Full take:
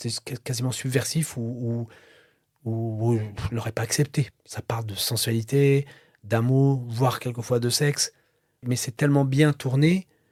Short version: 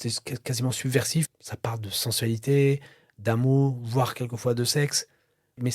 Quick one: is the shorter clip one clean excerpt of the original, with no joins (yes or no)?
no